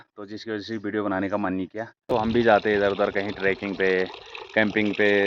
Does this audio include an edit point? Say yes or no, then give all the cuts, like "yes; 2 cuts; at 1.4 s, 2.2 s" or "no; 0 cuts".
yes; 1 cut; at 2.1 s